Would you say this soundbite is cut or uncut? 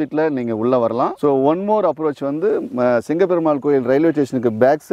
cut